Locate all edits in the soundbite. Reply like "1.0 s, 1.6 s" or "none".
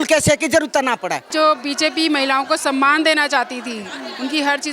1.3 s